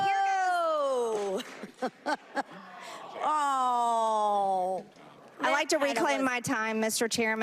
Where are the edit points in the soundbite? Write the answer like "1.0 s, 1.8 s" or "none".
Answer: none